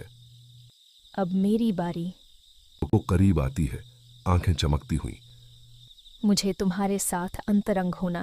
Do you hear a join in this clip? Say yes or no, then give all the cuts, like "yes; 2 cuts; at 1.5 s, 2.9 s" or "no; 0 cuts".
yes; 1 cut; at 2.9 s